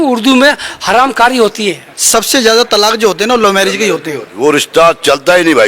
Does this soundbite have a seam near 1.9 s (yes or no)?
yes